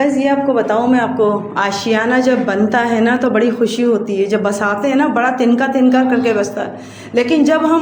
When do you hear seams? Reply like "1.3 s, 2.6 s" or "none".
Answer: none